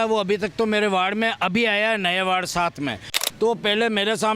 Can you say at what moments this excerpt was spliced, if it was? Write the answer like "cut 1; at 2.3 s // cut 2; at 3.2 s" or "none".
cut 1; at 3.2 s

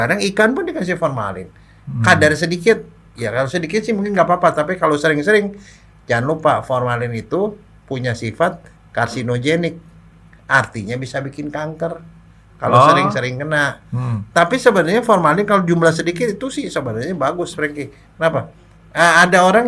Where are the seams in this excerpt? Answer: none

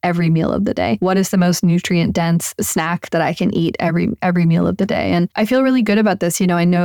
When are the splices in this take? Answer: cut 1; at 1.0 s // cut 2; at 2.6 s // cut 3; at 5.3 s

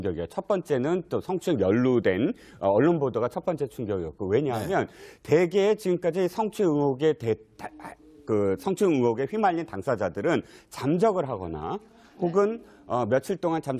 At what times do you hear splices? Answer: none

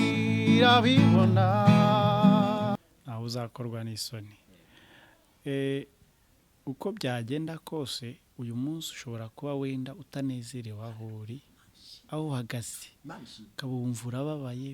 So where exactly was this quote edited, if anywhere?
cut 1; at 2.7 s

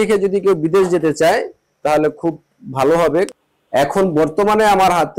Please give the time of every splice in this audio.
cut 1; at 3.3 s

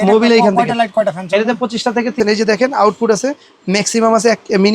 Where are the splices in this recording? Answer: cut 1; at 2.2 s

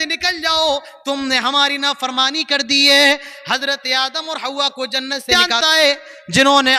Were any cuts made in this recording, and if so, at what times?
cut 1; at 5.5 s

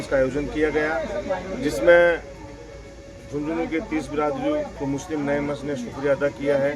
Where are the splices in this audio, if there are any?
cut 1; at 4.7 s

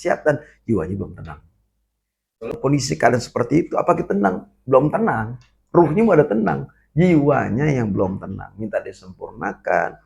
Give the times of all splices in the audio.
cut 1; at 2.6 s

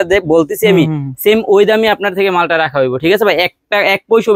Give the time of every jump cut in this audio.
none

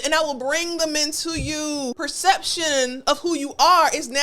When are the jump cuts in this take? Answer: cut 1; at 1.9 s

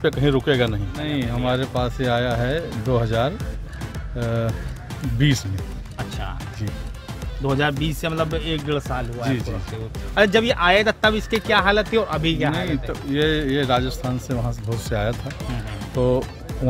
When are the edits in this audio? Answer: none

